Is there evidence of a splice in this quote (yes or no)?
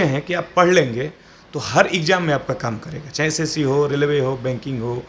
no